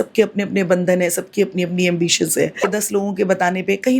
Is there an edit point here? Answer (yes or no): yes